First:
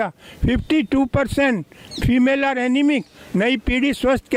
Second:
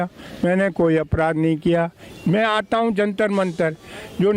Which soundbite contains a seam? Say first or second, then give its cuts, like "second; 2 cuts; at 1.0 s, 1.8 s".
second; 1 cut; at 2.0 s